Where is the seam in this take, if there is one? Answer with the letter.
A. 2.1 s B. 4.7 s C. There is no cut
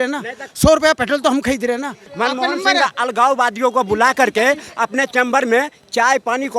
A